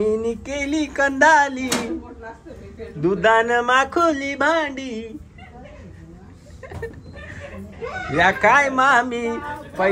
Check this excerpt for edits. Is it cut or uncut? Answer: uncut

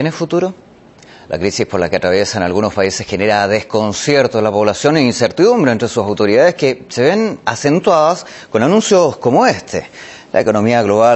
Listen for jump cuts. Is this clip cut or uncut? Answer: cut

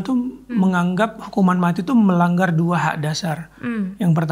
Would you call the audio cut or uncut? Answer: uncut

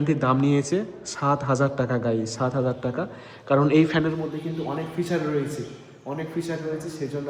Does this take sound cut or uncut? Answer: uncut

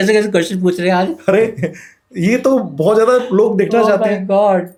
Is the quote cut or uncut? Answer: uncut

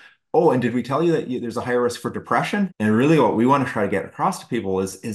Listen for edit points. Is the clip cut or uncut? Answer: cut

